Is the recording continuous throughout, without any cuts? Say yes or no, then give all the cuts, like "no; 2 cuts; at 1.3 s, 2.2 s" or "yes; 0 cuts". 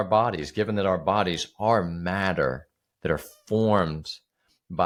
yes; 0 cuts